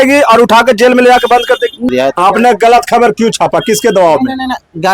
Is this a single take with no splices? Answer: no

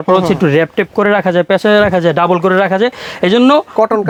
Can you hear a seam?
no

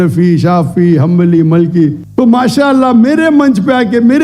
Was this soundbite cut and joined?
yes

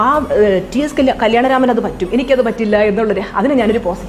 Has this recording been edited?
no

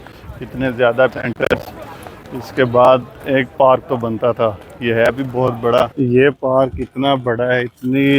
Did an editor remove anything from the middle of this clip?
yes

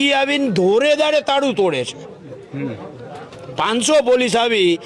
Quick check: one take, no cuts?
yes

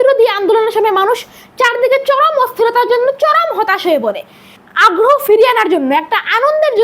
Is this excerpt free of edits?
no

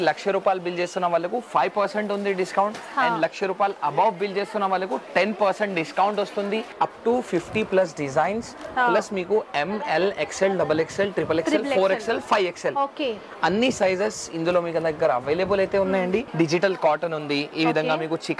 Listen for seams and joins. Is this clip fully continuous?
no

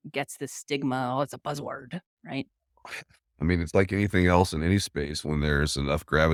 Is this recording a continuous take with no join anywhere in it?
yes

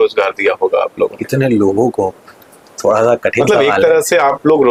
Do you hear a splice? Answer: no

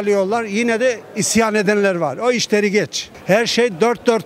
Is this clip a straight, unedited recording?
no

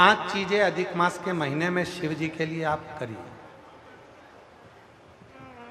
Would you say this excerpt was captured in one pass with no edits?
yes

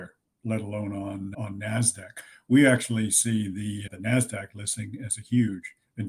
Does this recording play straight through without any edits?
yes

